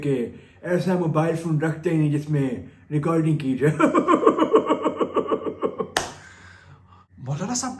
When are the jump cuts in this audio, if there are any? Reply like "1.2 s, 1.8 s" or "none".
none